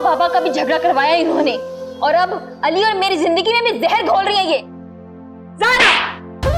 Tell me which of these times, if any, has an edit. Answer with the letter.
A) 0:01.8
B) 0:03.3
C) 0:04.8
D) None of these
D